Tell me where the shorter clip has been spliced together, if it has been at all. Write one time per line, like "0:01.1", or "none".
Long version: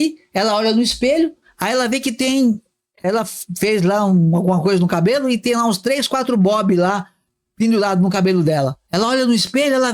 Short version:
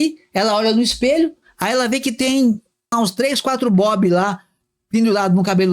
0:02.9

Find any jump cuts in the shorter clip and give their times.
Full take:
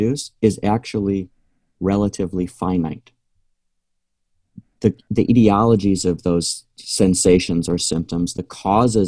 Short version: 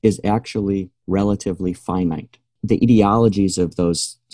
0:00.9
0:02.6

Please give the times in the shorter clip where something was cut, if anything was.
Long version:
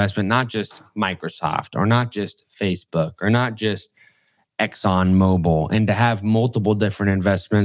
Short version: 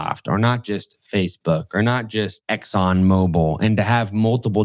0:02.4

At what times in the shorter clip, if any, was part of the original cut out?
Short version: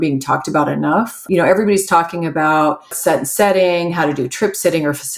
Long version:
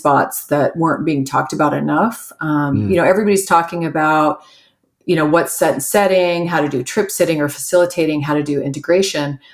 0:01.2
0:03.0

